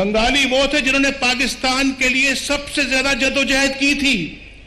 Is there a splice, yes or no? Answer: no